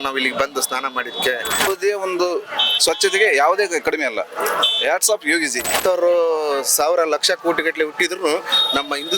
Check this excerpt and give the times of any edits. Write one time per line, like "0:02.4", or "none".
0:01.7
0:05.8